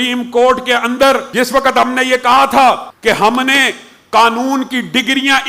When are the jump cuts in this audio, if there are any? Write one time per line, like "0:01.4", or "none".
0:01.3
0:02.9